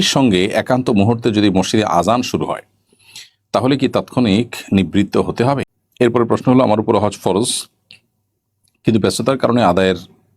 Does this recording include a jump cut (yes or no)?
yes